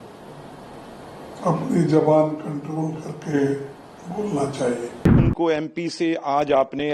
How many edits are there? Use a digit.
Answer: 1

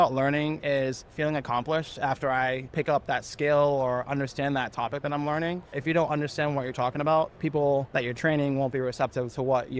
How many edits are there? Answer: 3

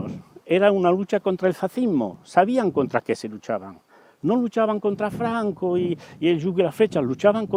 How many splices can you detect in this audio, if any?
0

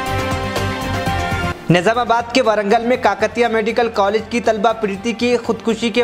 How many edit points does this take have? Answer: 1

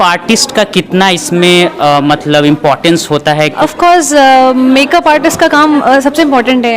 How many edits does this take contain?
1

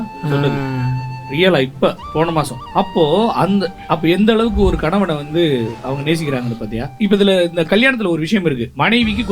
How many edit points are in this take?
0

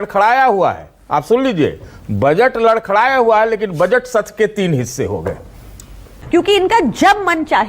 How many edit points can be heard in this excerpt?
1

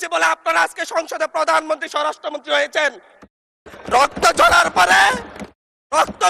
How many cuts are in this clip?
0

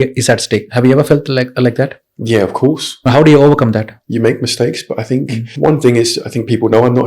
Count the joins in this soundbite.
3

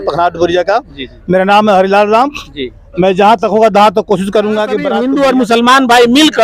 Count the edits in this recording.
1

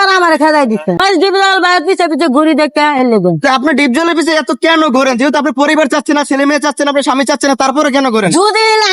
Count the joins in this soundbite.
1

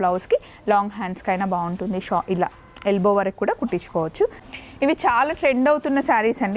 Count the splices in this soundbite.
1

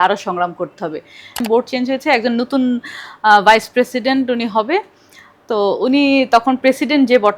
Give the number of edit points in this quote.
1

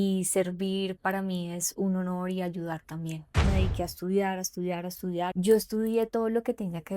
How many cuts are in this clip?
2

